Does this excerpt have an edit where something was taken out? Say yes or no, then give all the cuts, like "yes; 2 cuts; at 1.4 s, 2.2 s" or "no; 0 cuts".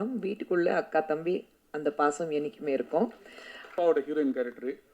yes; 1 cut; at 3.7 s